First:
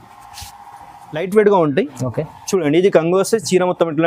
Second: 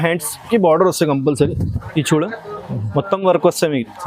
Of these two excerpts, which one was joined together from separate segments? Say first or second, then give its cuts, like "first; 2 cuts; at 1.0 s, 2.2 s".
first; 1 cut; at 1.1 s